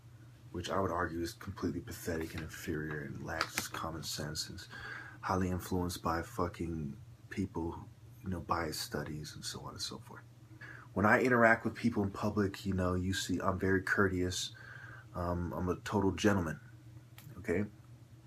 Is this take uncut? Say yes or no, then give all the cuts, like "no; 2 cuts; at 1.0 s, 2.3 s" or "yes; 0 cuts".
yes; 0 cuts